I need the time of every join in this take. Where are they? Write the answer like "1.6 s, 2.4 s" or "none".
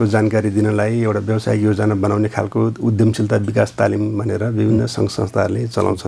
none